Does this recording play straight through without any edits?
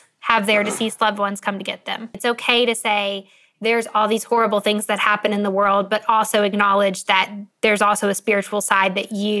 no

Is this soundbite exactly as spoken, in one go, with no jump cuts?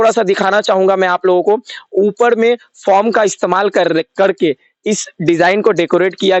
yes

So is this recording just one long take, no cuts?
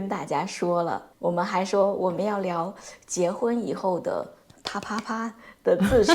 no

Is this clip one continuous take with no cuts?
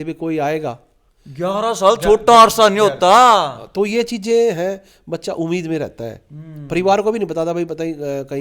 yes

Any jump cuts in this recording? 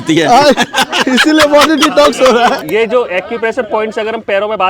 yes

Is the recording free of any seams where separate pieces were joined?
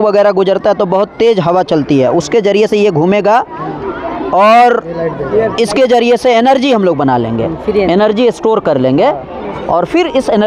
yes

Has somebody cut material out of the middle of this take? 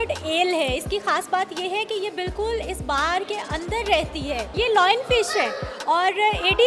yes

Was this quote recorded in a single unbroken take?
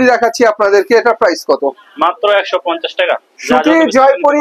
no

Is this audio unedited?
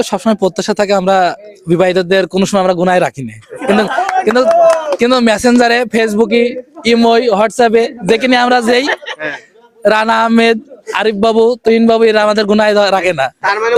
yes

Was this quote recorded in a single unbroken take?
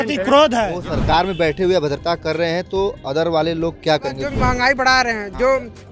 no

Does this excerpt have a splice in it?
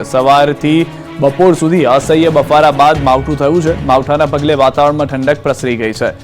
yes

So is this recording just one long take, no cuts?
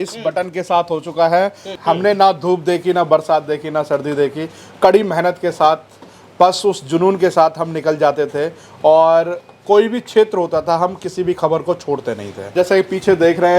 no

